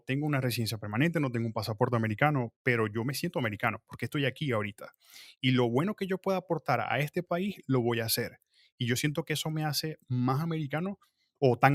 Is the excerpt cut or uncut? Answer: uncut